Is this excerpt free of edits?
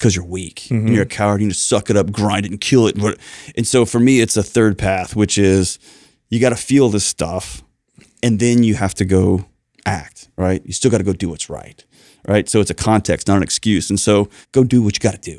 no; 1 cut; at 14.4 s

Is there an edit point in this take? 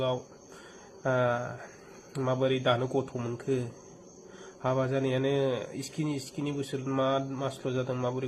no; 0 cuts

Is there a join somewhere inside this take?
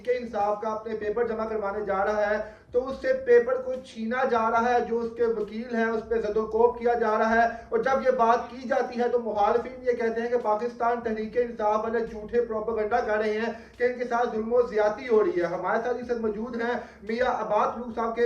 no; 0 cuts

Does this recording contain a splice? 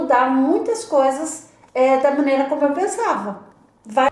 no; 0 cuts

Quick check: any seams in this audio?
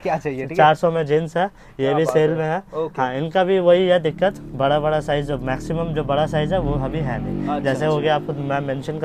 no; 0 cuts

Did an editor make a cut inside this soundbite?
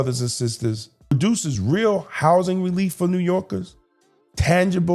yes; 1 cut; at 1.1 s

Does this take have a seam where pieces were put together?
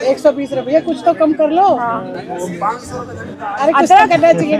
no; 0 cuts

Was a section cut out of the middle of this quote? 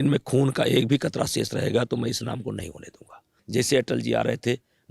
yes; 1 cut; at 3.3 s

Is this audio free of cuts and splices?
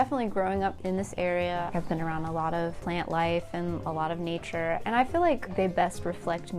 no; 3 cuts; at 0.8 s, 1.7 s, 2.8 s

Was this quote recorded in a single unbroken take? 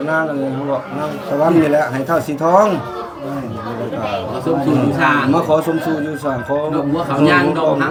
yes; 0 cuts

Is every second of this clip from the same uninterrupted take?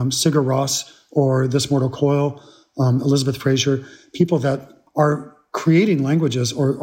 no; 1 cut; at 4.8 s

